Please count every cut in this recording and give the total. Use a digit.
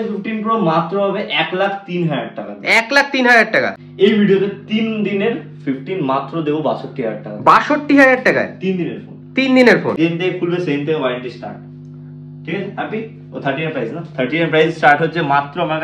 2